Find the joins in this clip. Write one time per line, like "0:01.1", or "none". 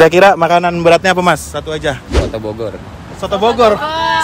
none